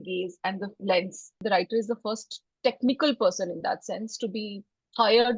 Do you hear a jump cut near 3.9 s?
no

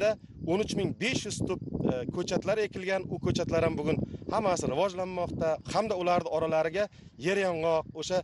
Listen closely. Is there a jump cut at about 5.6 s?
yes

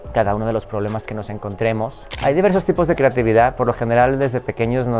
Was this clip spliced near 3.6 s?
no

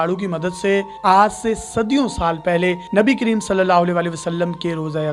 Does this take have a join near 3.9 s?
no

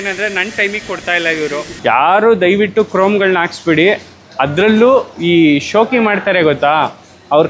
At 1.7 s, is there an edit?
yes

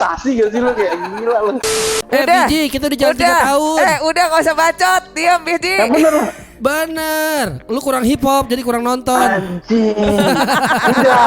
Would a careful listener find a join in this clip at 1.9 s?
yes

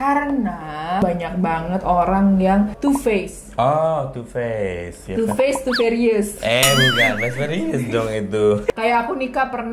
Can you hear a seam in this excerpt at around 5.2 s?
no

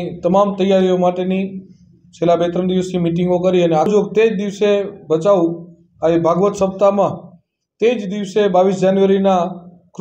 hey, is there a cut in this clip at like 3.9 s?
yes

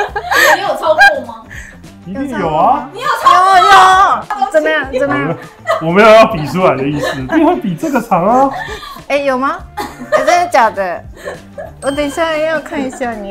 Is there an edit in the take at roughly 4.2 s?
no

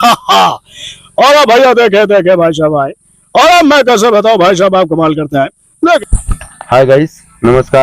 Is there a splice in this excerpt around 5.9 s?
yes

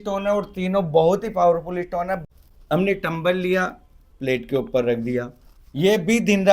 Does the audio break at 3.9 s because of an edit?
no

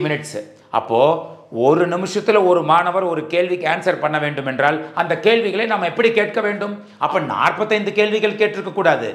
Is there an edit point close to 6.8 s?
yes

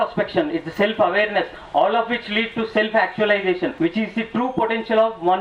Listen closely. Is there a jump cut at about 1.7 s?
no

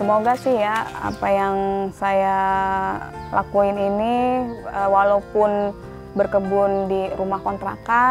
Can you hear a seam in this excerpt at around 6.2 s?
no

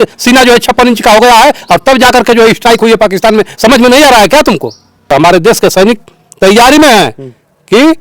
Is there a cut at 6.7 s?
no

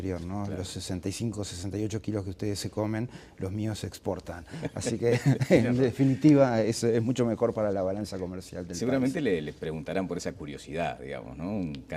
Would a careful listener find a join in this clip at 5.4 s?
yes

